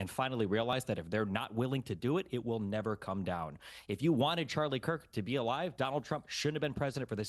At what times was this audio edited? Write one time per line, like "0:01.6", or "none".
0:01.1